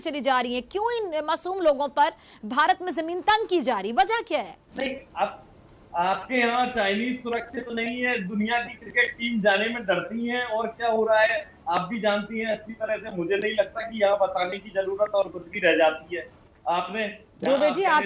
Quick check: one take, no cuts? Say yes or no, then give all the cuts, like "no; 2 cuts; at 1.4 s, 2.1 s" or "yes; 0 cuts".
no; 1 cut; at 4.6 s